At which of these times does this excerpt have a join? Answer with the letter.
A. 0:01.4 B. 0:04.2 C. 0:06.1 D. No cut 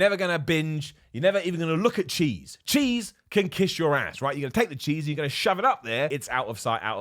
C